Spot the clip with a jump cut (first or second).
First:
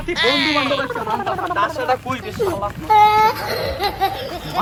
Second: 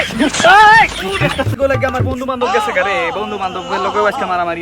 second